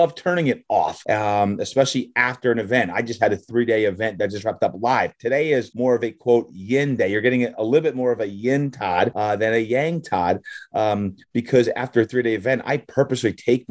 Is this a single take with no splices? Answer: no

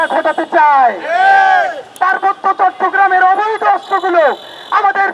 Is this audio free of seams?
no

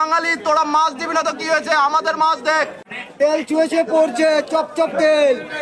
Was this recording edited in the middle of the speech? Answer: yes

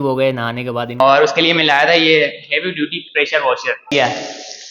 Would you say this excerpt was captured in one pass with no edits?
no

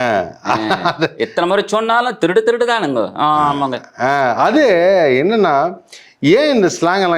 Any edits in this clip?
no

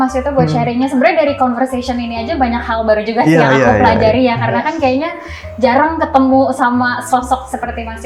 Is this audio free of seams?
yes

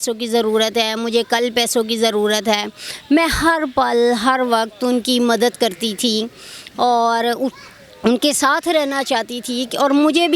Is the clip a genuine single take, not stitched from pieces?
yes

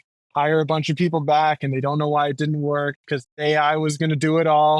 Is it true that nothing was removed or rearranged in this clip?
no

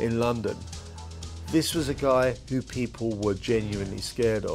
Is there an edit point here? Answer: yes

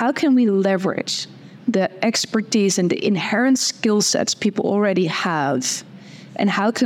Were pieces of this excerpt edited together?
no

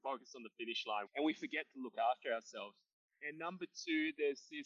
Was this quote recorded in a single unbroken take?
no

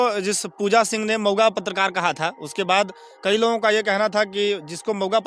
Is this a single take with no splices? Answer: yes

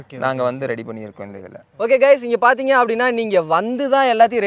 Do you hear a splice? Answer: no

